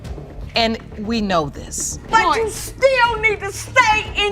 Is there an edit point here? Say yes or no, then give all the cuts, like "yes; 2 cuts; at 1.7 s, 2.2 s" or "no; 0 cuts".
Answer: yes; 1 cut; at 2.0 s